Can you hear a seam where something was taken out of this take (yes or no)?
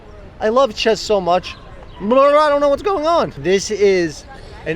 yes